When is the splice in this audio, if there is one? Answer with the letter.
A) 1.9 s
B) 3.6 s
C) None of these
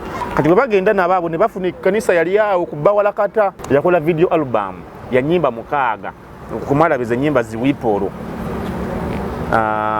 B